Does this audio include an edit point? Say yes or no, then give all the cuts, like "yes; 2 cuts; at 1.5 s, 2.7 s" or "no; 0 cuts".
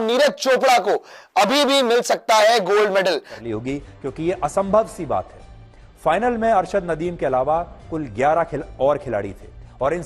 yes; 1 cut; at 3.3 s